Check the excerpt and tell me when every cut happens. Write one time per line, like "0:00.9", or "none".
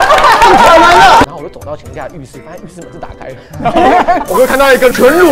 0:01.2